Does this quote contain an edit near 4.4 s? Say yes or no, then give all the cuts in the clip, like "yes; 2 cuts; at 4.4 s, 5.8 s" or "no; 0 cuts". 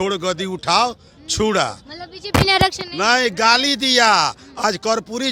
no; 0 cuts